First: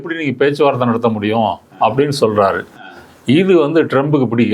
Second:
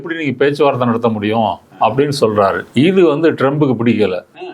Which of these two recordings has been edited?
second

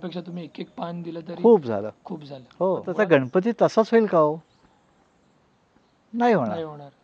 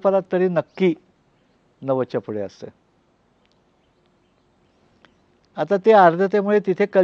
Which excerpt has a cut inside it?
first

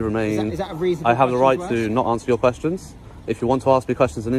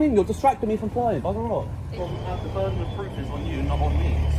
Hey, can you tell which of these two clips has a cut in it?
second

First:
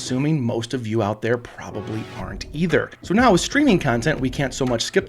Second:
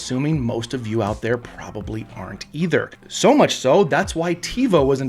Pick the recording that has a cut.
first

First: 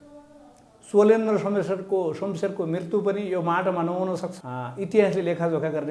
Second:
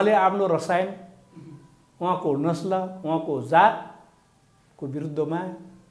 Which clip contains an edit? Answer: first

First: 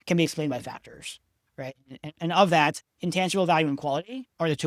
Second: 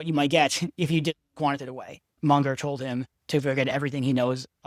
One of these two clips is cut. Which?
second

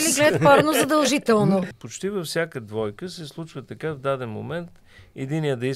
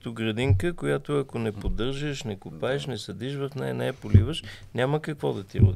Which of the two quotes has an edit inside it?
first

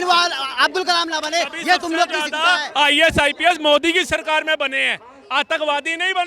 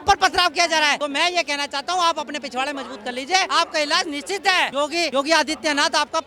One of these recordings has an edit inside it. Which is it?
second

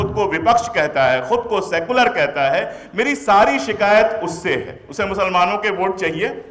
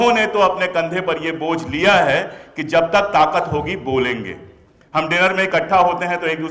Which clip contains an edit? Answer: first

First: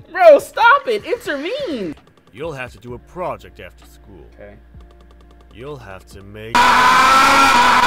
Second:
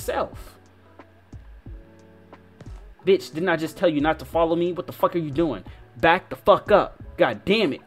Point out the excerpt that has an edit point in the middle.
first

